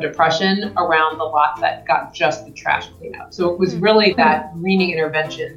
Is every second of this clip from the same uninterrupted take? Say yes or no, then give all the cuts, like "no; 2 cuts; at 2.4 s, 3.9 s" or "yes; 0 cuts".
yes; 0 cuts